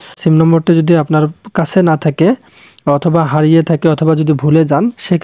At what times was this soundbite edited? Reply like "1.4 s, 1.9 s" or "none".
none